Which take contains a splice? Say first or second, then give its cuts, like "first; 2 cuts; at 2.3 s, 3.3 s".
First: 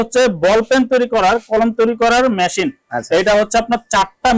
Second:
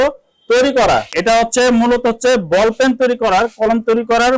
second; 1 cut; at 1.1 s